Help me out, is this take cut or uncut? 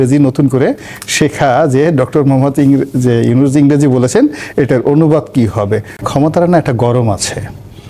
cut